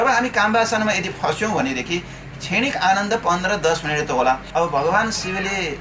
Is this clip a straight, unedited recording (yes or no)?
no